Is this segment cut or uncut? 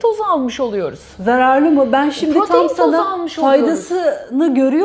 uncut